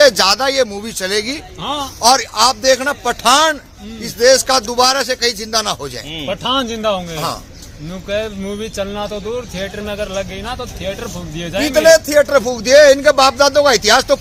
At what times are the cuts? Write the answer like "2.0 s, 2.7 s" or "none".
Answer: none